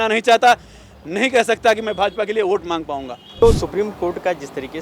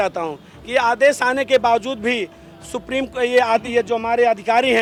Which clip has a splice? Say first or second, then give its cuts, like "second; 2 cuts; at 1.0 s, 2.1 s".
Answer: first; 1 cut; at 3.4 s